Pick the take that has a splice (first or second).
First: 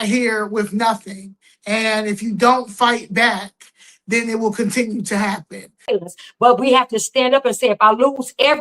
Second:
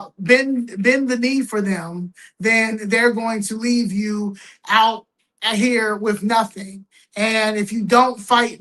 first